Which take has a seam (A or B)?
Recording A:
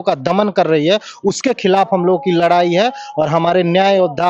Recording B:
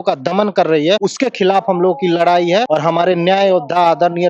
B